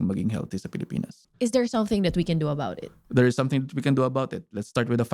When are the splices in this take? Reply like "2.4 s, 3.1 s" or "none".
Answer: none